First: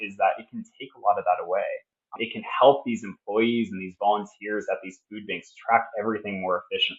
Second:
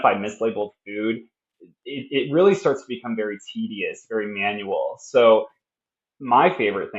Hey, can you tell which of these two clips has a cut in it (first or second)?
first